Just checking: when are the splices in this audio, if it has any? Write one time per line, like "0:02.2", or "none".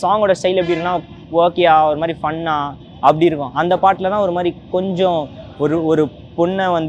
none

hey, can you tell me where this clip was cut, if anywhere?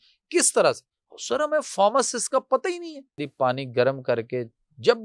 0:03.2

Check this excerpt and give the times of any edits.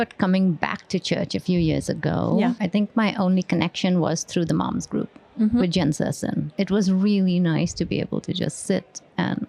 0:02.6
0:06.4

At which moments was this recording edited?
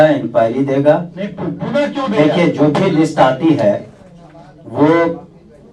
none

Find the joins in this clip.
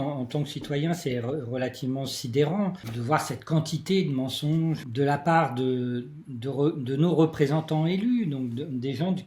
0:02.9
0:04.8

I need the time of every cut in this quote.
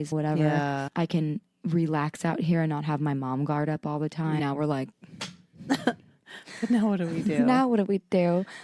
0:04.4

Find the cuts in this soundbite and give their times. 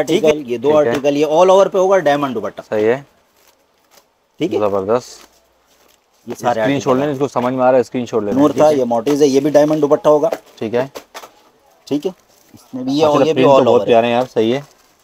0:08.3

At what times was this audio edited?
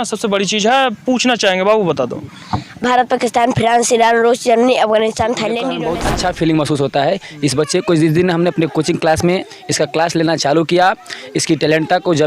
0:05.8

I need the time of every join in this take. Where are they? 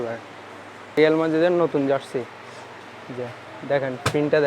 0:00.9

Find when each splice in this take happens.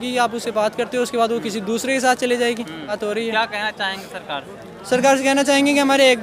0:02.9

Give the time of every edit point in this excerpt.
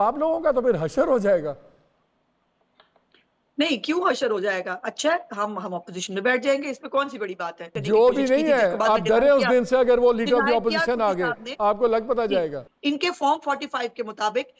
0:07.7
0:12.6

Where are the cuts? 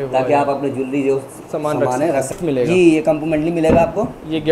0:02.3

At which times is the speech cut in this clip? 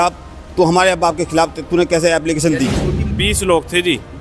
0:03.2

